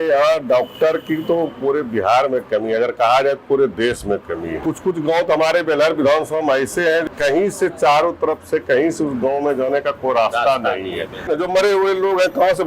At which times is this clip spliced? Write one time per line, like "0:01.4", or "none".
0:04.5
0:07.1
0:11.3